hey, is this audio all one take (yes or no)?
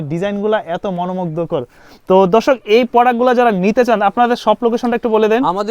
yes